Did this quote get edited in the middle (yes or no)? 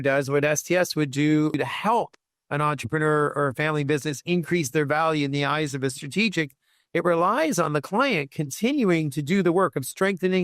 yes